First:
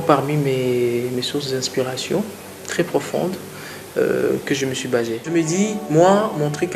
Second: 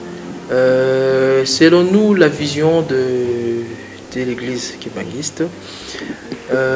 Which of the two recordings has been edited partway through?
first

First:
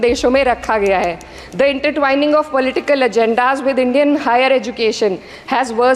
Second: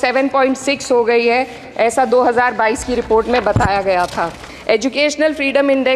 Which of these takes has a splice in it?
second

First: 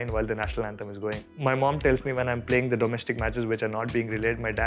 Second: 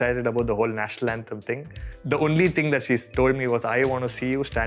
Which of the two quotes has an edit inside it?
first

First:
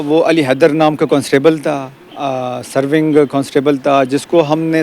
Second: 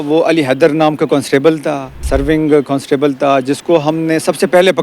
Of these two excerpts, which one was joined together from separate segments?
second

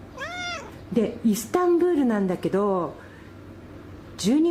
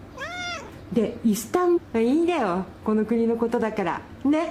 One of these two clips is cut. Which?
first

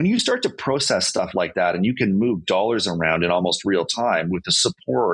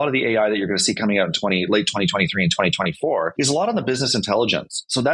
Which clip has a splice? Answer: second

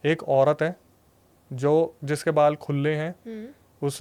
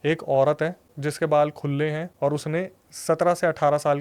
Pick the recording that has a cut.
second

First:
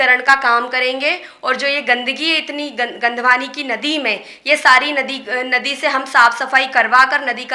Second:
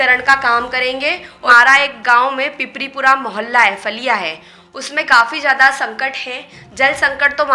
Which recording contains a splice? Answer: second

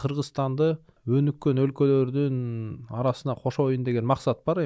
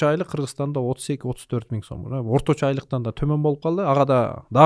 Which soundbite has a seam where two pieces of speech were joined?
first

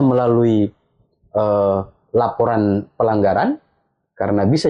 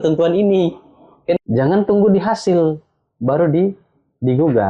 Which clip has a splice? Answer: second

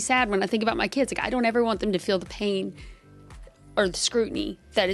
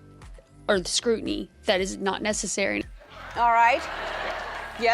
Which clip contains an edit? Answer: second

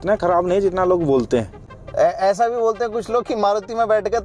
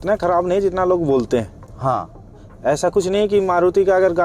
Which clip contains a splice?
first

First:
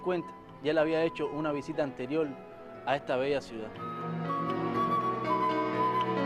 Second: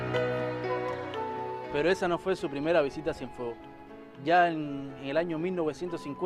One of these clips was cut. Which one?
second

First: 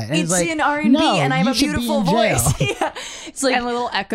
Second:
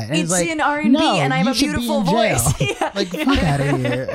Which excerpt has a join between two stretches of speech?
second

